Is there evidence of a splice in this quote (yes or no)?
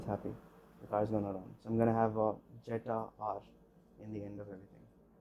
yes